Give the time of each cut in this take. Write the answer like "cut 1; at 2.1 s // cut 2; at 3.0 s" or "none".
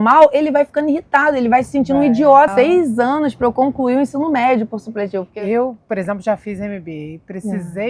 cut 1; at 2.5 s // cut 2; at 5.3 s